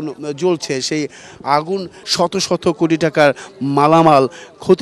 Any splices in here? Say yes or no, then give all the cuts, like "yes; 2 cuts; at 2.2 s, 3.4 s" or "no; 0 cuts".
yes; 1 cut; at 2.0 s